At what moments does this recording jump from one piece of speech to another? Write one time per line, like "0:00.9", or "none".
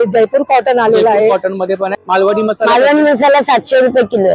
0:02.1